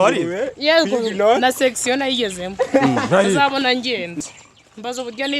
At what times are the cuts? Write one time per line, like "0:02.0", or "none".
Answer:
0:04.1